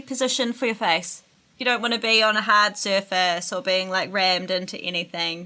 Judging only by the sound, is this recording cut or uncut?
cut